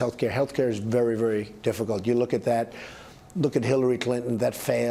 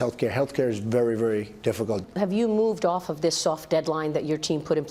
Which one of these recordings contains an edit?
second; 1 cut; at 1.9 s

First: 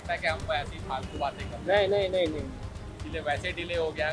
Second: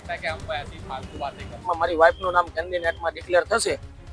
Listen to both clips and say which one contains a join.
second; 1 cut; at 1.6 s

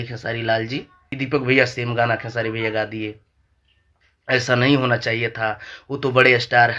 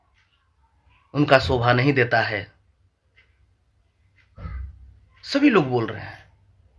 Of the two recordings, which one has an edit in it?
first; 1 cut; at 1.0 s

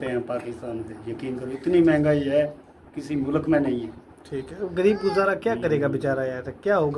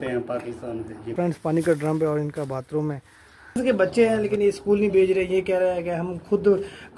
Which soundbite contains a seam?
second; 2 cuts; at 1.1 s, 3.6 s

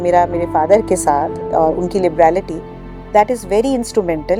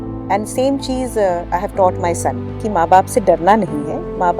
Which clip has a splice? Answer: second; 1 cut; at 2.6 s

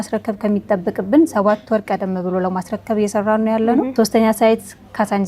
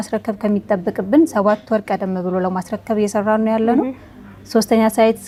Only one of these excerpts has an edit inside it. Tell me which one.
first; 1 cut; at 3.9 s

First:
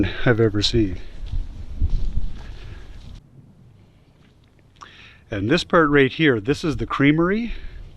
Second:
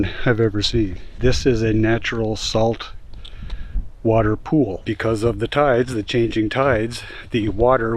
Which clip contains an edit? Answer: second; 2 cuts; at 1.0 s, 4.8 s

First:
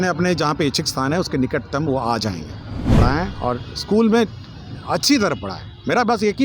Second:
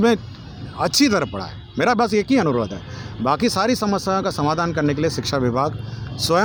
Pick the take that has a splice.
first; 1 cut; at 3.0 s

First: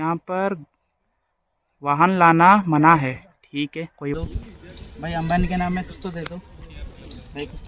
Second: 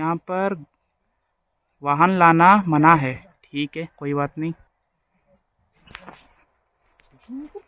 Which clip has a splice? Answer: first; 1 cut; at 4.1 s

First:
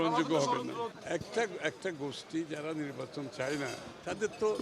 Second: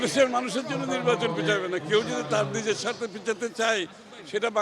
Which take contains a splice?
first; 1 cut; at 0.9 s

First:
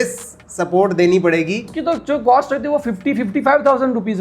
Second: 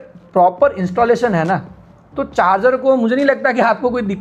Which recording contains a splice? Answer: first; 1 cut; at 1.7 s

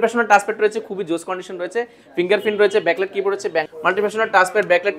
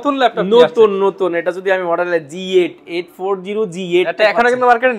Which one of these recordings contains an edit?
first; 1 cut; at 3.7 s

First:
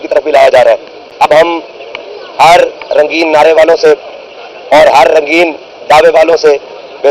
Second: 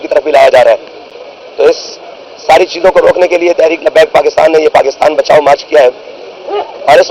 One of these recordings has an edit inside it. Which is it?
first; 1 cut; at 1.0 s

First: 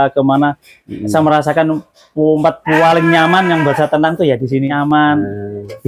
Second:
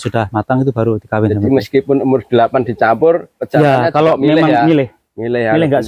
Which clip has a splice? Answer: first; 1 cut; at 4.8 s

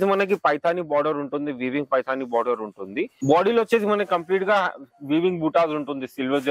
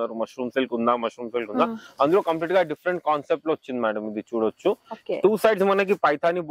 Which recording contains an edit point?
first; 1 cut; at 3.2 s

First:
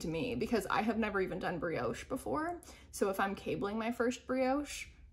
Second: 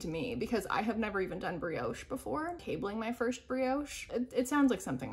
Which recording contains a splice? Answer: second; 2 cuts; at 2.6 s, 4.0 s

